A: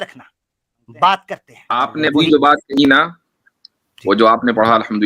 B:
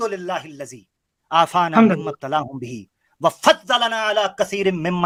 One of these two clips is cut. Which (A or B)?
A